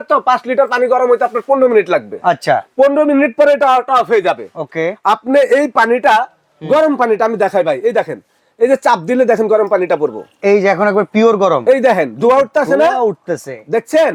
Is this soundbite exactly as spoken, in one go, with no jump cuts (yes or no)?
yes